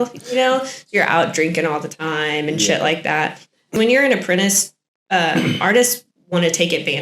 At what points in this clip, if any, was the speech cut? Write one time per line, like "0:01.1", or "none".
0:03.7